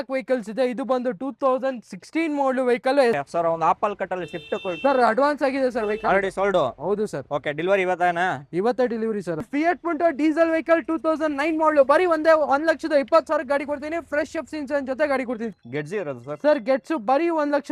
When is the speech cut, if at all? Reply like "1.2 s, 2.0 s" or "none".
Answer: 3.2 s, 9.4 s, 15.5 s